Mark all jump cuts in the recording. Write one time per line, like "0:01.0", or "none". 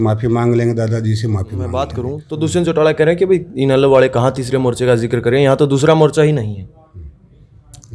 0:01.7